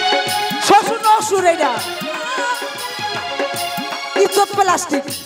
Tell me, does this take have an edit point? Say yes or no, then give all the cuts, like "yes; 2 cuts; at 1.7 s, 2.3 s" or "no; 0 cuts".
yes; 1 cut; at 2.7 s